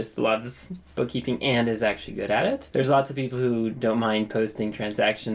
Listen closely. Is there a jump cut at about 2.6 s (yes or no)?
yes